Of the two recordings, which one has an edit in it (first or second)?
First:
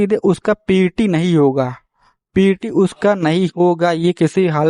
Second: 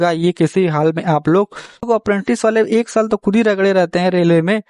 second